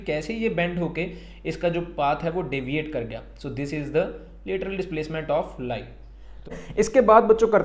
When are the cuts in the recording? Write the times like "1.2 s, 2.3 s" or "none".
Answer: none